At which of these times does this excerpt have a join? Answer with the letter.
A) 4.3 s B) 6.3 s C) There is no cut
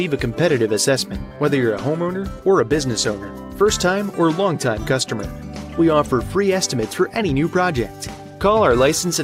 C